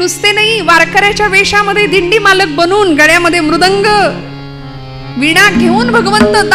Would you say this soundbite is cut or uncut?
uncut